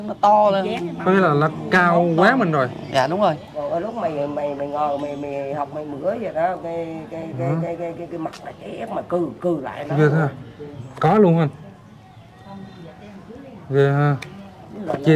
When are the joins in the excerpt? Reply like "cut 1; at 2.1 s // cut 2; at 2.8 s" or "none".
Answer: none